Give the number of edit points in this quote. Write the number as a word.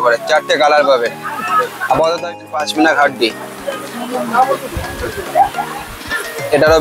one